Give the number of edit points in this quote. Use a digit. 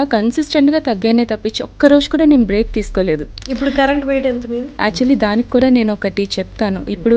2